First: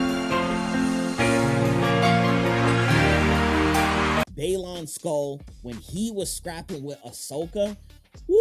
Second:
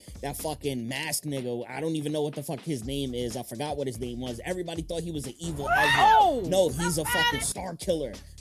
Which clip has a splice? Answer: first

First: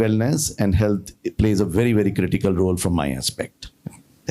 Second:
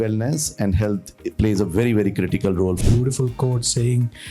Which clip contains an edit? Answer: second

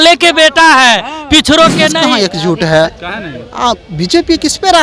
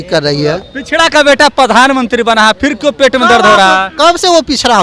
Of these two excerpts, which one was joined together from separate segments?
first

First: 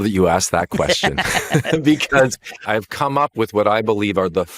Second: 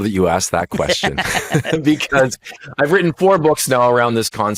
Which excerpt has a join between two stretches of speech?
first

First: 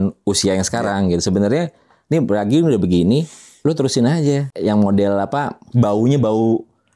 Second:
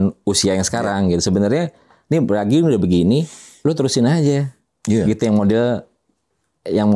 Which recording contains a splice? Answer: first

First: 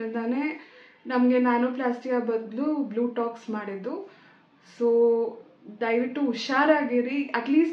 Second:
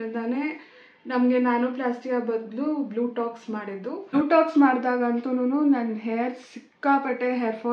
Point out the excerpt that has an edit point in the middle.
second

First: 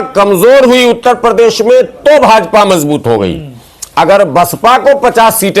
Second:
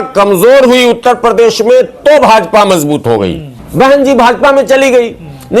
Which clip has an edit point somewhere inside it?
second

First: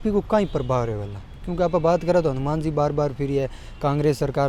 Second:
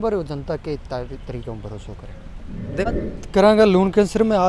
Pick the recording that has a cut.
second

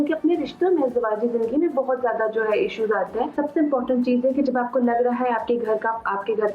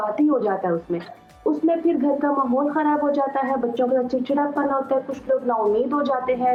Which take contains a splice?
first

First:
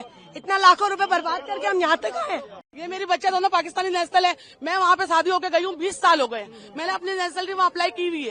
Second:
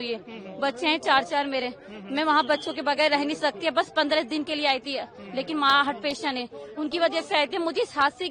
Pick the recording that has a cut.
first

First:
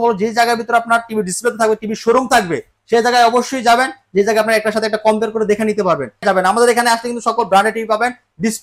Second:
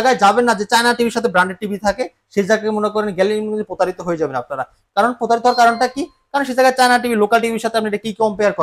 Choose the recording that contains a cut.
first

